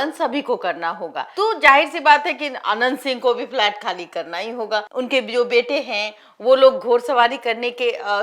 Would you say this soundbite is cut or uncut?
cut